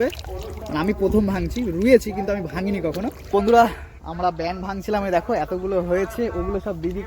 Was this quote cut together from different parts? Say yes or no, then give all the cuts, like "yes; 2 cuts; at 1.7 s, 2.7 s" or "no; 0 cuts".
yes; 1 cut; at 3.3 s